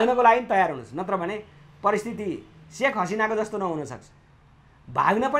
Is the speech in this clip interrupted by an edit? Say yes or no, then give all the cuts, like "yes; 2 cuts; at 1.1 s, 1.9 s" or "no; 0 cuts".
no; 0 cuts